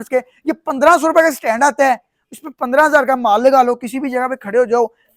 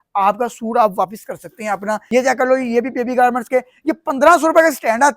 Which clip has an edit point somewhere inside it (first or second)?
second